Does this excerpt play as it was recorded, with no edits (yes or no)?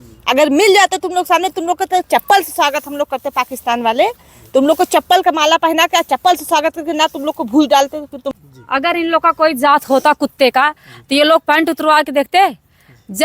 no